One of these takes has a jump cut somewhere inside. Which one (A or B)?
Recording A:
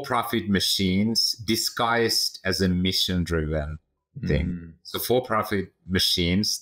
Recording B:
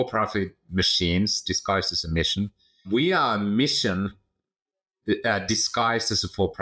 B